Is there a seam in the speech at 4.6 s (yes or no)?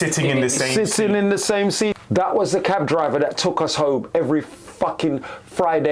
no